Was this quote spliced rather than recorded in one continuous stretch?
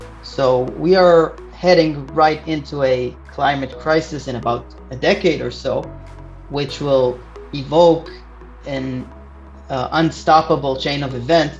no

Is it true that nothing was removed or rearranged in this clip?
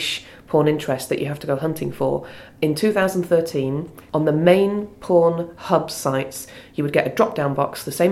no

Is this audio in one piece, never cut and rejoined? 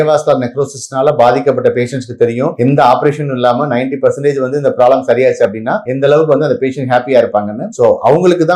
yes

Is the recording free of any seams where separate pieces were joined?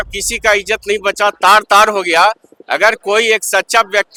yes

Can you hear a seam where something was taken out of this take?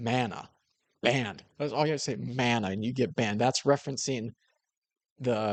no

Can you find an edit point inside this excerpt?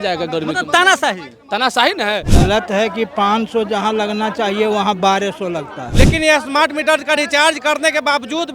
yes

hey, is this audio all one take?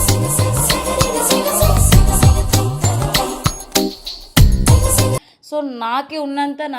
yes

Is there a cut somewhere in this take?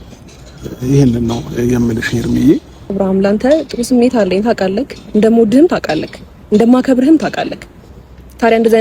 yes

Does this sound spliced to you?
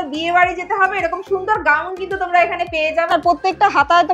yes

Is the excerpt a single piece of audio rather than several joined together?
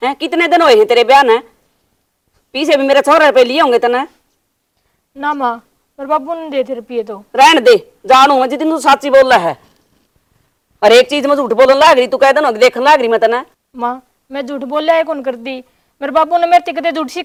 yes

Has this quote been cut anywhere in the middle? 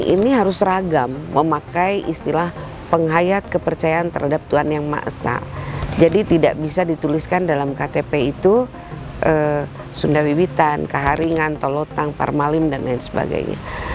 no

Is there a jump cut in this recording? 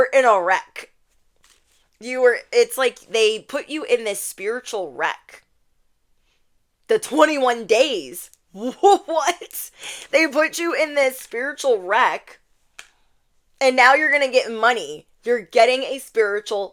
no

